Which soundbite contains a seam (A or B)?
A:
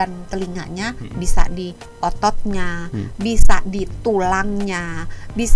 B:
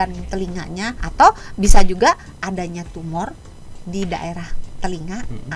B